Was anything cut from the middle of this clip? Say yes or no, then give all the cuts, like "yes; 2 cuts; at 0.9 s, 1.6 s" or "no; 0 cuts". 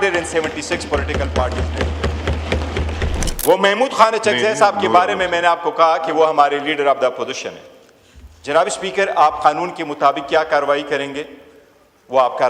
yes; 1 cut; at 3.1 s